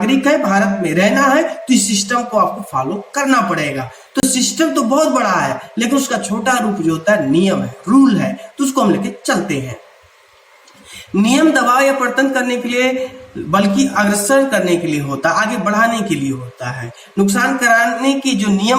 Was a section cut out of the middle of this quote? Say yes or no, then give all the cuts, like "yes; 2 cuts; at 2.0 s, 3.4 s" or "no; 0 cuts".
no; 0 cuts